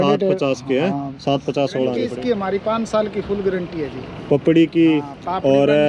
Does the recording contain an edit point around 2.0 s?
yes; 1 cut; at 2.0 s

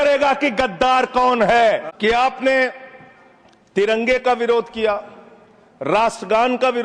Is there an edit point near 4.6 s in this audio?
no; 1 cut; at 1.9 s

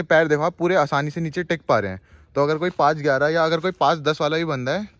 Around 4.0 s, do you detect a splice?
no; 0 cuts

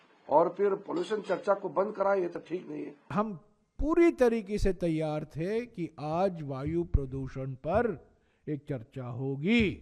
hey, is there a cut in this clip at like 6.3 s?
no; 1 cut; at 3.1 s

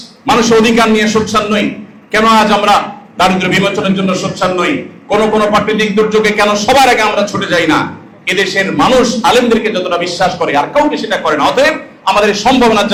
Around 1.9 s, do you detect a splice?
no; 0 cuts

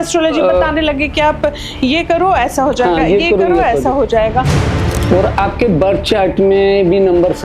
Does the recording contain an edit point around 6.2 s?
no; 1 cut; at 4.8 s

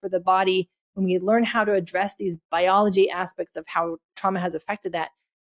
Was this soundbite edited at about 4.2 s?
yes; 1 cut; at 4.2 s

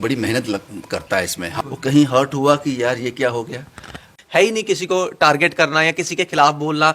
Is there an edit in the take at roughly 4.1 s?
yes; 2 cuts; at 1.6 s, 4.1 s

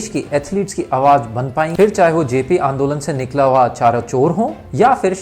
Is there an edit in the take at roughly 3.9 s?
no; 1 cut; at 1.7 s

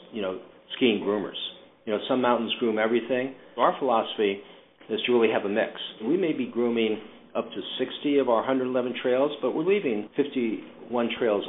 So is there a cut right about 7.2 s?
no; 3 cuts; at 3.5 s, 6.0 s, 10.4 s

